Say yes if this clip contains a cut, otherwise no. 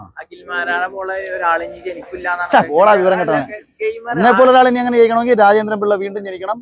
no